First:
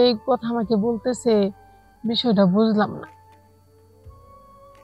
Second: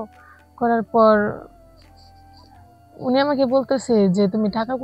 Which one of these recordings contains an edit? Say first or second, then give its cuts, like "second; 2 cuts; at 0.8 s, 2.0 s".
second; 2 cuts; at 1.5 s, 2.9 s